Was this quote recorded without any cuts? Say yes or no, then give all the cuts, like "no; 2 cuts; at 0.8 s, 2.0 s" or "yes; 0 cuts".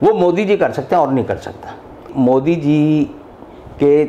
no; 1 cut; at 2.1 s